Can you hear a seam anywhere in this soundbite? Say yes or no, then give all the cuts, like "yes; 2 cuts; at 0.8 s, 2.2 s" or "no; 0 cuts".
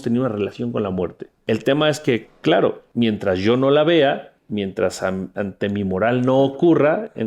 yes; 3 cuts; at 1.3 s, 2.8 s, 4.3 s